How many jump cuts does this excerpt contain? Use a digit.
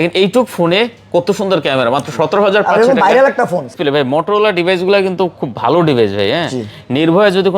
1